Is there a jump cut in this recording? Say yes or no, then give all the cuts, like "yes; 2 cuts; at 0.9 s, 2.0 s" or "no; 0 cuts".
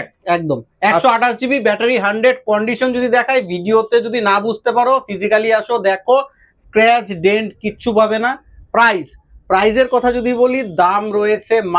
no; 0 cuts